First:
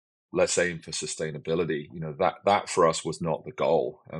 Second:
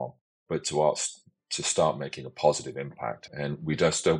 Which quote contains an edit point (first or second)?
second